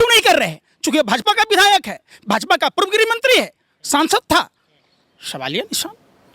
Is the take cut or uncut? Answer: uncut